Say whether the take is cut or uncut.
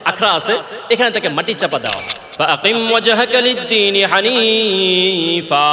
cut